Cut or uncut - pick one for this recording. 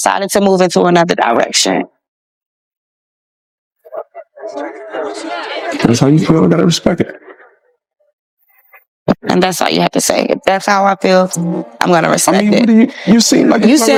uncut